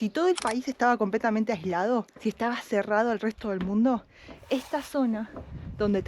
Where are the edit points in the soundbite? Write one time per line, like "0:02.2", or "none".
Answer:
0:02.1